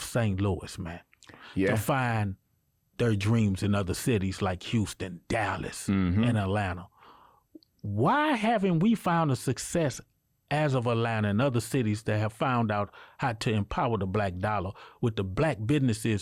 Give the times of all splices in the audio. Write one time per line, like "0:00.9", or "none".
none